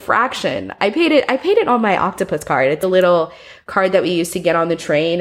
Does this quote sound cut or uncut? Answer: cut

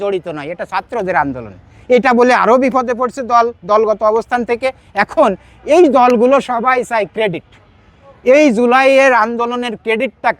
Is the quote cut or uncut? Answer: uncut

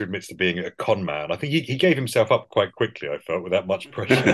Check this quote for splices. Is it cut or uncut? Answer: uncut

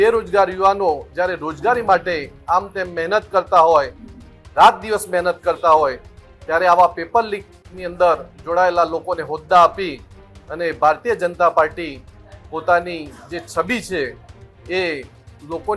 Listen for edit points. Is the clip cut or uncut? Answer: uncut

